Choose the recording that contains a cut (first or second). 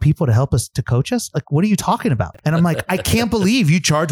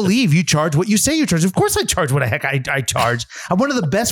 first